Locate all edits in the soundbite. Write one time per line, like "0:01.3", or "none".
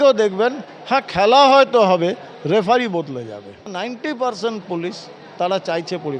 0:03.7